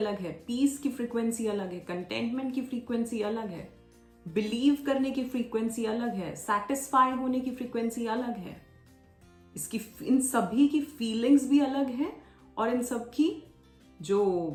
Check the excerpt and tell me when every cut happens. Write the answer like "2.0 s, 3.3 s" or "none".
none